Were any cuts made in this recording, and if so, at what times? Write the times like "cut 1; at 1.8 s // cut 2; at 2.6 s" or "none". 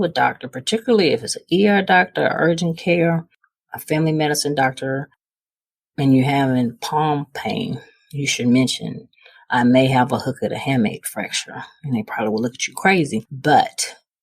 cut 1; at 13.3 s